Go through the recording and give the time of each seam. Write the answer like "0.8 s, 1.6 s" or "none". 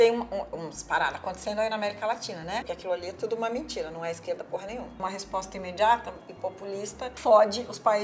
2.6 s, 5.0 s, 7.0 s